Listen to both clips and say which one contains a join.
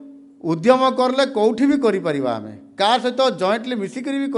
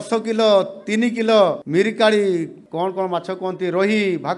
second; 2 cuts; at 1.6 s, 2.6 s

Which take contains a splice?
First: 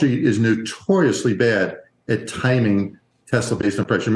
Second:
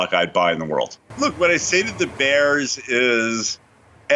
second; 1 cut; at 1.0 s

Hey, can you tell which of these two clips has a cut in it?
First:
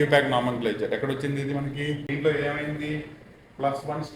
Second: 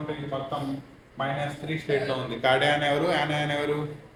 first; 1 cut; at 2.0 s

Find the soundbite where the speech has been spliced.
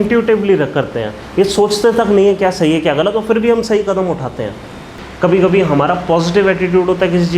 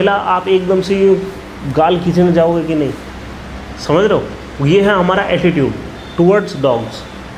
first; 1 cut; at 5.0 s

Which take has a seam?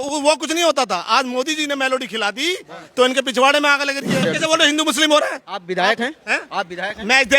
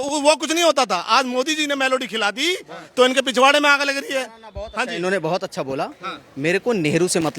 first; 1 cut; at 4.2 s

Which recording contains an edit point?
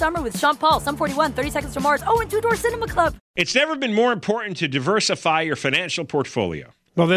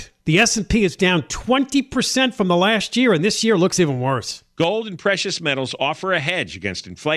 first; 1 cut; at 3.2 s

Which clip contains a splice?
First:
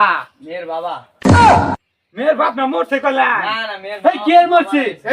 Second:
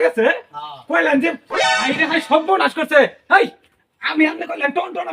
first; 2 cuts; at 1.1 s, 1.9 s

